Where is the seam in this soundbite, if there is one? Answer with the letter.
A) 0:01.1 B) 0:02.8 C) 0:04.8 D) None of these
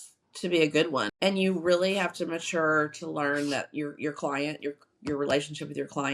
A